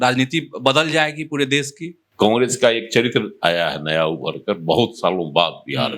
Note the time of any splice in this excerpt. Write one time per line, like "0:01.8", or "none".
0:02.0